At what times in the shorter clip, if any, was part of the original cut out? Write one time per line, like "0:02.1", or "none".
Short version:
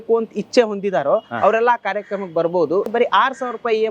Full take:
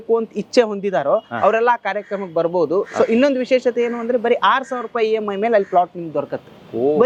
0:02.9